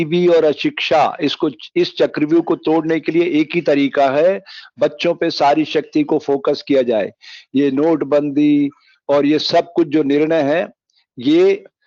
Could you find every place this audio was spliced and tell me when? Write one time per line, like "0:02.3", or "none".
none